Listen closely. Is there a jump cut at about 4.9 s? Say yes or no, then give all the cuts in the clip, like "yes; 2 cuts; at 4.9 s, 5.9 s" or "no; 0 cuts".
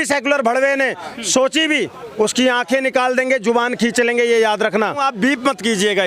yes; 1 cut; at 4.9 s